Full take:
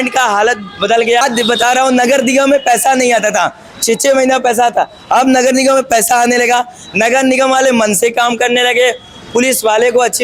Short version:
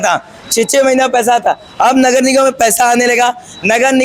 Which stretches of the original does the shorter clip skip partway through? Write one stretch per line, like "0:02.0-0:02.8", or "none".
none